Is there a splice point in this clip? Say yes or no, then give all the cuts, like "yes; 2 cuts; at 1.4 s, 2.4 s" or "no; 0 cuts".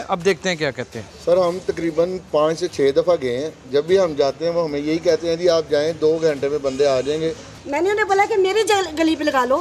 yes; 2 cuts; at 1.1 s, 7.5 s